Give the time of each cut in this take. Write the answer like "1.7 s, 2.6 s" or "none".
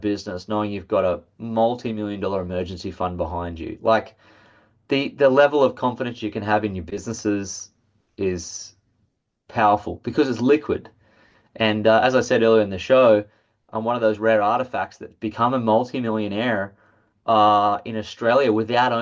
none